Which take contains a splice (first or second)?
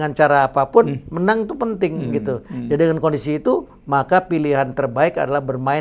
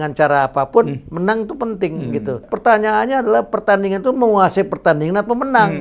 second